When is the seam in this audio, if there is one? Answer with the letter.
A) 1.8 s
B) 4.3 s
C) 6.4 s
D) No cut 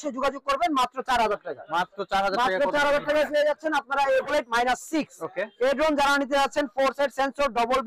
B